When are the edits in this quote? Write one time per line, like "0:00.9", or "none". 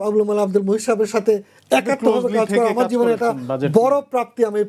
none